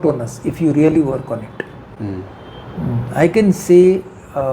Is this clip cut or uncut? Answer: uncut